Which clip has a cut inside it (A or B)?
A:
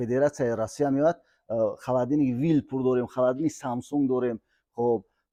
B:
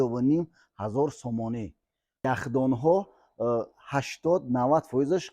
B